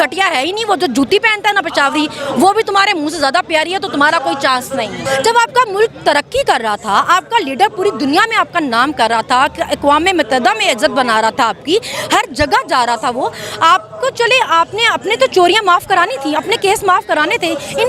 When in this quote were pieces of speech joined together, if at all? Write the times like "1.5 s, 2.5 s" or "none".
5.0 s